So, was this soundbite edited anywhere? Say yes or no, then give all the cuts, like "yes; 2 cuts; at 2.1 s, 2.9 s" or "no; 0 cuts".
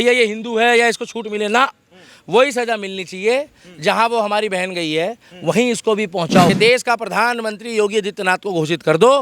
yes; 1 cut; at 6.5 s